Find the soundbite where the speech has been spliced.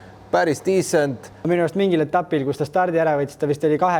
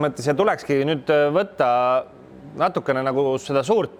first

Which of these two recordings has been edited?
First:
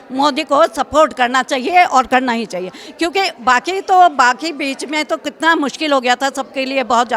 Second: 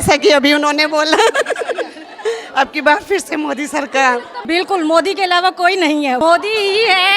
second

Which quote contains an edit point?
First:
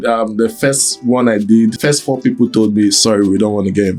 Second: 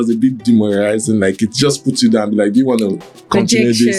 first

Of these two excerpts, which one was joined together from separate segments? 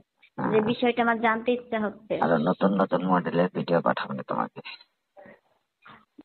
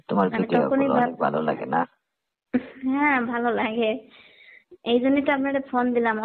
first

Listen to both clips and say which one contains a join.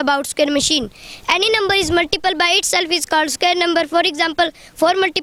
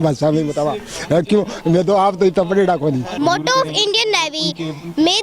second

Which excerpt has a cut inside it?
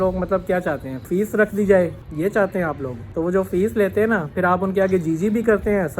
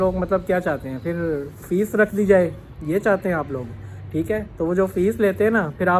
first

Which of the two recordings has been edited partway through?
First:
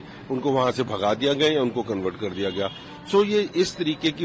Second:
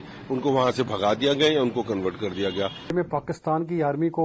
second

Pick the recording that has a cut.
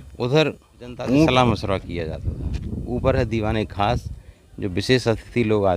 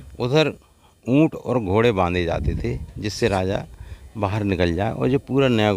first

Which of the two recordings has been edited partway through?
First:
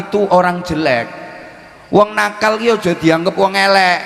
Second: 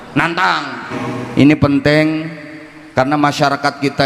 second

